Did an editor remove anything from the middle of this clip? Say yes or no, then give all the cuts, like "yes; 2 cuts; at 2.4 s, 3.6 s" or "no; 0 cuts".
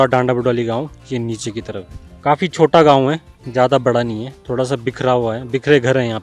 yes; 1 cut; at 2.0 s